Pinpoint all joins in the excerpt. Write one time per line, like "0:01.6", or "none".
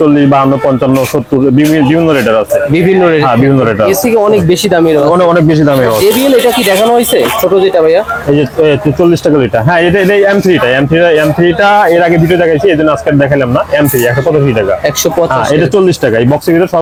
none